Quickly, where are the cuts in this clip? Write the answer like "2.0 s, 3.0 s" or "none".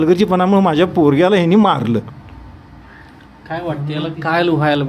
none